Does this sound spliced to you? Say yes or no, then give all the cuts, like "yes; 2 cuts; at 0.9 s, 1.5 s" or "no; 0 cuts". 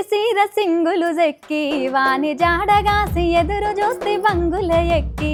no; 0 cuts